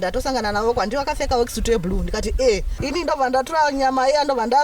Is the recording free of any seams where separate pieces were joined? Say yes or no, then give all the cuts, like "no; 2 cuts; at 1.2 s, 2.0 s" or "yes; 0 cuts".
no; 1 cut; at 2.7 s